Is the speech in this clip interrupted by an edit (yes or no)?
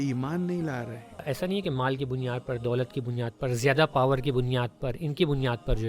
yes